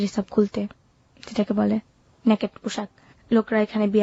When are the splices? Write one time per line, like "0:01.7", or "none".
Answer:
none